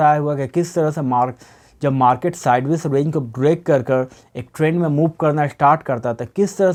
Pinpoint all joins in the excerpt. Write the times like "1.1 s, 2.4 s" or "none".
none